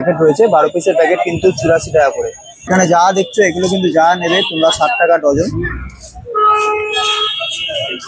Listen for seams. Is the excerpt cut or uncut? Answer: cut